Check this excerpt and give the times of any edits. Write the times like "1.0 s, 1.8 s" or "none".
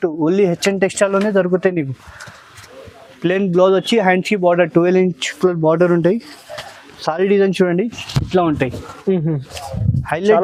none